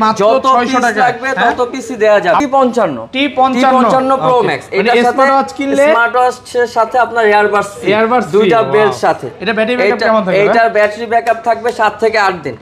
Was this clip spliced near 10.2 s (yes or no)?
no